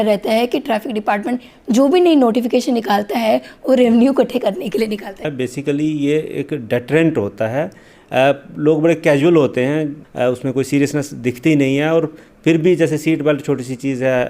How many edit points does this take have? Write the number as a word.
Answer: two